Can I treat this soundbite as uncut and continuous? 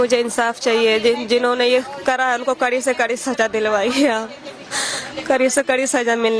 yes; 0 cuts

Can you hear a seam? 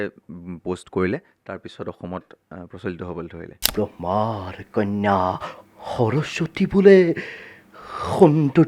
yes; 1 cut; at 3.7 s

